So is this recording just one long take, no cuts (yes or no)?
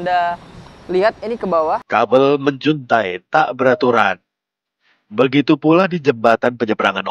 no